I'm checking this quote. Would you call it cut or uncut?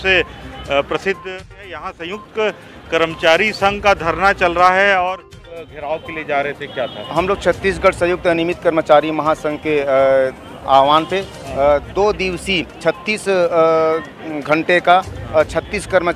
cut